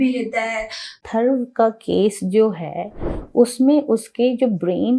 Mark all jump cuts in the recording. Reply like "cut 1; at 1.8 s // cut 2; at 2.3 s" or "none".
cut 1; at 1.0 s